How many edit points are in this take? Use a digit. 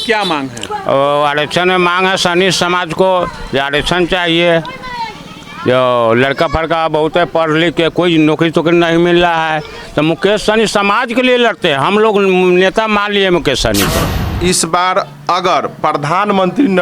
1